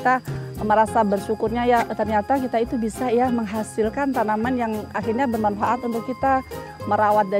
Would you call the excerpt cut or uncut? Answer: uncut